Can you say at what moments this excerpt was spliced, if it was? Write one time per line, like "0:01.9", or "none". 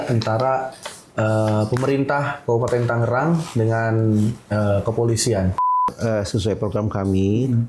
0:05.9